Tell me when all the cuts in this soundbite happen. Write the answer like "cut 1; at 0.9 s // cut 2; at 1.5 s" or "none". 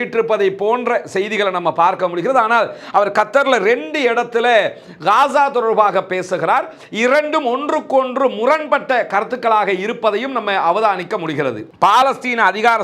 cut 1; at 11.7 s